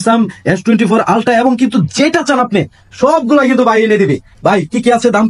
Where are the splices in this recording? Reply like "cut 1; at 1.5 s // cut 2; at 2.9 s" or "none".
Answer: none

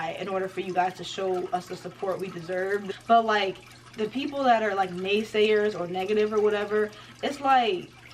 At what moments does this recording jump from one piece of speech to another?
cut 1; at 2.9 s

